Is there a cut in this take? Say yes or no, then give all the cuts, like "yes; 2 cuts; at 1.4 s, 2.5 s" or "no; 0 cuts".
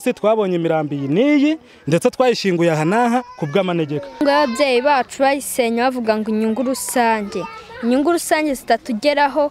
yes; 1 cut; at 4.2 s